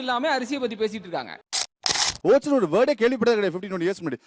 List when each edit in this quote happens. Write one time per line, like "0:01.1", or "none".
0:01.8